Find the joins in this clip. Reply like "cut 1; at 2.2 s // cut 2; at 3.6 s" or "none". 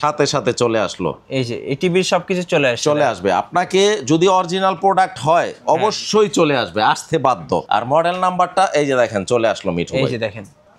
cut 1; at 7.6 s